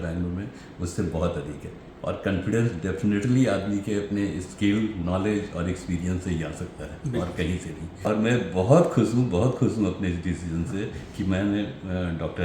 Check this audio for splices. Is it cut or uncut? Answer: cut